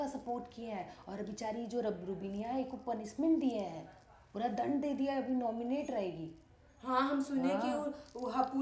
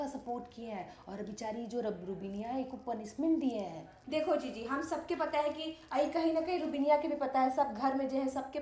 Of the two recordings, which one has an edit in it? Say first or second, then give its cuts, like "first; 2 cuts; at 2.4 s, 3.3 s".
second; 1 cut; at 3.9 s